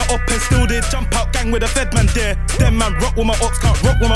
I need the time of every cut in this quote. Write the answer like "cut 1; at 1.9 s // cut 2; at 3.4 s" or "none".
none